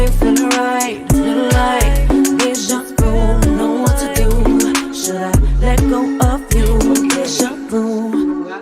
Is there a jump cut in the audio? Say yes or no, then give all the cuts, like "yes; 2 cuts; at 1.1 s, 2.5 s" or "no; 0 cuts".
yes; 1 cut; at 1.1 s